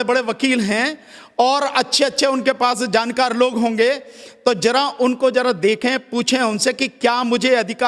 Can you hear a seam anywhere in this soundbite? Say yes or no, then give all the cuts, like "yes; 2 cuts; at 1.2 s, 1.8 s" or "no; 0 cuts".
no; 0 cuts